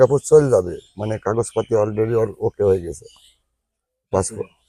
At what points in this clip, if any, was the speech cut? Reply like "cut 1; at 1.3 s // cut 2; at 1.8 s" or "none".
none